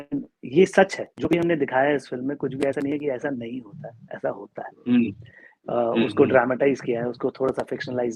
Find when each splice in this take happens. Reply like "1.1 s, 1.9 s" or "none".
none